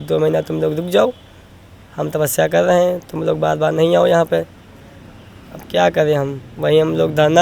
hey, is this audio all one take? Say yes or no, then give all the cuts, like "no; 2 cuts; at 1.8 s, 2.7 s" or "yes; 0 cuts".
yes; 0 cuts